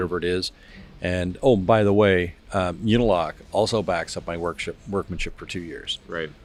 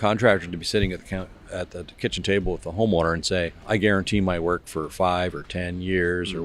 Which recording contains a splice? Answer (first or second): second